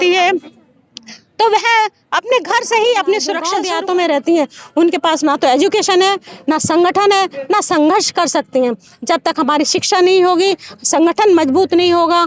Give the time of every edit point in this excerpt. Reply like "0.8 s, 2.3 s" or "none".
3.5 s